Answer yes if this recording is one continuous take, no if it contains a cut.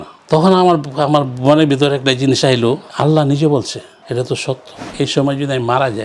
no